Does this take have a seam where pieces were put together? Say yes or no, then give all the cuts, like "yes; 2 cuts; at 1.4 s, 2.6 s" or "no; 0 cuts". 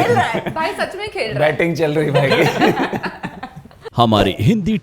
yes; 1 cut; at 3.8 s